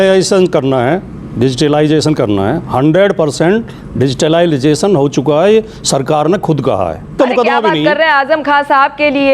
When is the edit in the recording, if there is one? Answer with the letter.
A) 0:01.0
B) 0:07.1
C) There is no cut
B